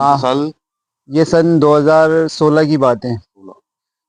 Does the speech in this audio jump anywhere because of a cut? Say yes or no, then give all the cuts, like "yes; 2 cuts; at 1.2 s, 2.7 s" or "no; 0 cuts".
no; 0 cuts